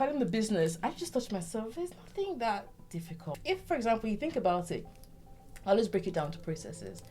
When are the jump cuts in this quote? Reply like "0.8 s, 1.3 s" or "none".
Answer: 3.4 s